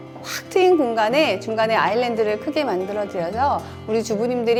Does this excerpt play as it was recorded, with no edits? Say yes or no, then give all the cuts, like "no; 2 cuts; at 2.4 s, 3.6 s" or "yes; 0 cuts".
yes; 0 cuts